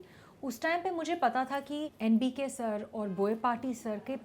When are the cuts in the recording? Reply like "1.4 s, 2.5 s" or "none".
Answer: 1.9 s